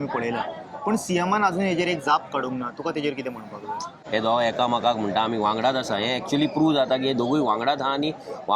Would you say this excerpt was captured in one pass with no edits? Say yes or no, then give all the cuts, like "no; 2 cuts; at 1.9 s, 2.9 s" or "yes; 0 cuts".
no; 1 cut; at 3.9 s